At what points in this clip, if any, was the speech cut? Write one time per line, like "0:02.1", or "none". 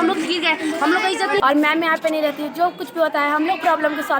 0:01.4